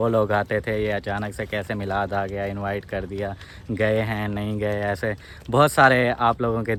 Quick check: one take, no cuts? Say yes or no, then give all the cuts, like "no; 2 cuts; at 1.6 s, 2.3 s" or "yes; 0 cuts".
yes; 0 cuts